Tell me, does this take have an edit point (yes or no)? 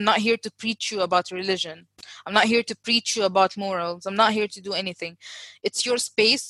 no